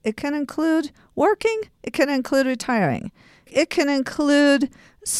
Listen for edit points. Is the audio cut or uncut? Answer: cut